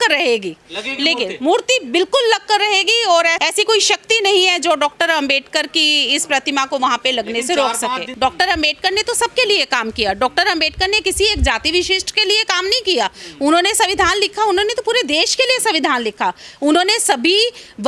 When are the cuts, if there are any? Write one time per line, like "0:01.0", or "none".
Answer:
0:03.3
0:08.1